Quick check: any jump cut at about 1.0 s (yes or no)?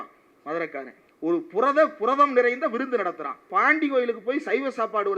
yes